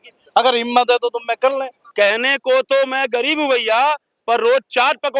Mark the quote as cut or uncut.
cut